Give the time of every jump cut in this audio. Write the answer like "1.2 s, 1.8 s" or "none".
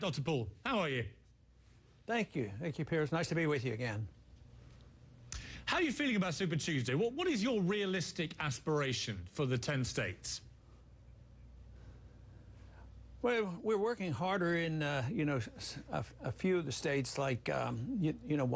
4.0 s